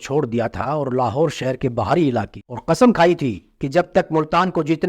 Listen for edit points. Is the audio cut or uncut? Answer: cut